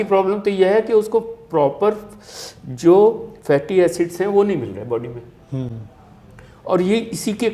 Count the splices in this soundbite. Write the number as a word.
zero